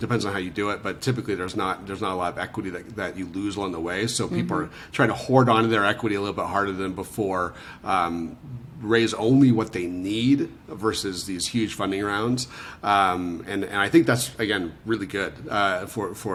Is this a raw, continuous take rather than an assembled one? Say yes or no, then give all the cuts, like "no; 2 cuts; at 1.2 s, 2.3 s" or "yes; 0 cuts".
yes; 0 cuts